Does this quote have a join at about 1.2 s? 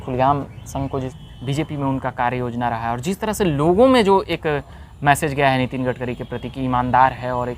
yes; 1 cut; at 1.2 s

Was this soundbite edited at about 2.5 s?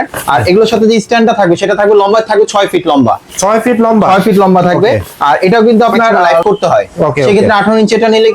no; 1 cut; at 6.4 s

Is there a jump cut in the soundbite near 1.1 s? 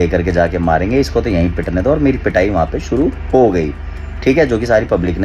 no; 0 cuts

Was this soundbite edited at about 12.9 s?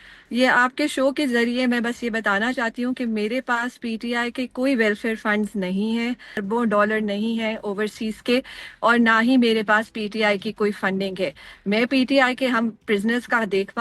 no; 1 cut; at 6.4 s

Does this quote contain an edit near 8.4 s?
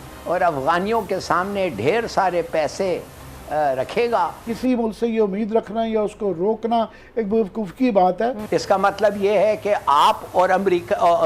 yes; 2 cuts; at 4.5 s, 8.4 s

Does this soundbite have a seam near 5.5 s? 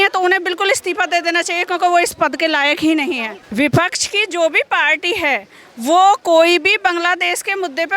no; 1 cut; at 3.3 s

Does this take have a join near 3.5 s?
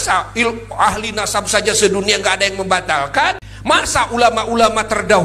yes; 1 cut; at 3.5 s

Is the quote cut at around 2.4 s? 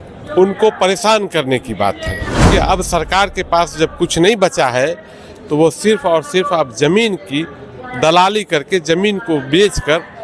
yes; 1 cut; at 2.4 s

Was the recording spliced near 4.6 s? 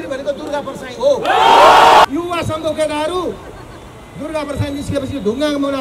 no; 1 cut; at 2.0 s

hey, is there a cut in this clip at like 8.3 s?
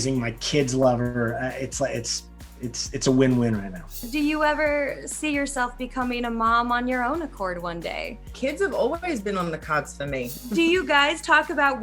yes; 3 cuts; at 4.0 s, 8.3 s, 10.3 s

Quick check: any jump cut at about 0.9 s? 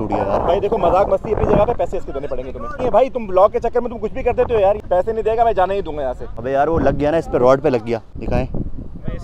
no; 4 cuts; at 2.7 s, 4.8 s, 6.2 s, 8.1 s

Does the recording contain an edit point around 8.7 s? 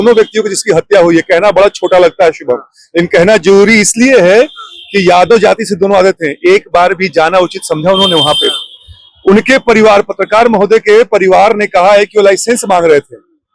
no; 0 cuts

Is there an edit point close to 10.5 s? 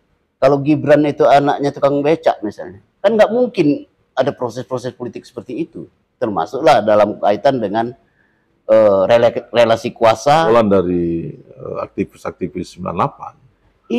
yes; 1 cut; at 10.5 s

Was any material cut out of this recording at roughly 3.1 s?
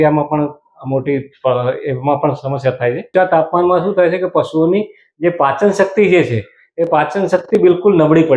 yes; 1 cut; at 3.1 s

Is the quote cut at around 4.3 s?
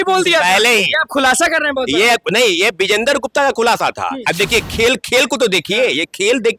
yes; 1 cut; at 4.3 s

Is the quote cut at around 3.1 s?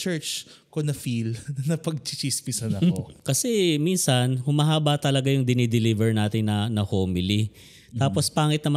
yes; 1 cut; at 3.1 s

